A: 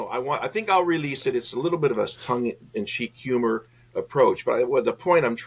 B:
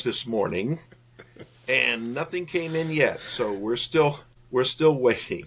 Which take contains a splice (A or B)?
B